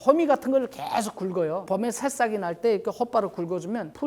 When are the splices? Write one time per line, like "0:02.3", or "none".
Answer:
none